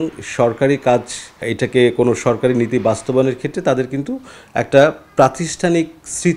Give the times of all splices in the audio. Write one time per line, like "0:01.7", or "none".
0:01.4